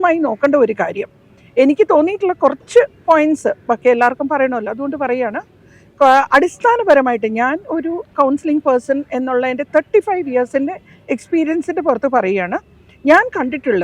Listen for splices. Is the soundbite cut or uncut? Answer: uncut